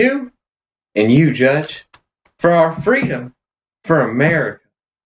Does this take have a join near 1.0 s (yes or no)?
no